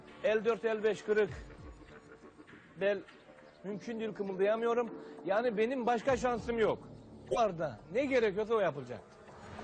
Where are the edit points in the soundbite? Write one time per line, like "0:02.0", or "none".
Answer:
0:07.4